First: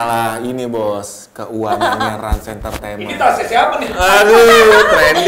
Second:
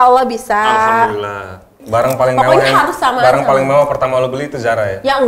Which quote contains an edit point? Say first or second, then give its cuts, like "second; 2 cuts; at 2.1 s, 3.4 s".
second; 1 cut; at 1.8 s